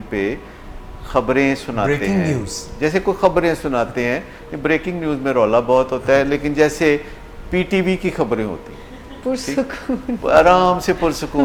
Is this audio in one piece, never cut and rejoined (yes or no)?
yes